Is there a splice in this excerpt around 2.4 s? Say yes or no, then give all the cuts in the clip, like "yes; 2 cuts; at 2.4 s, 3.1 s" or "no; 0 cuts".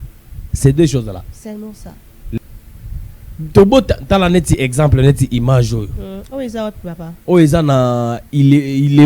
yes; 1 cut; at 2.4 s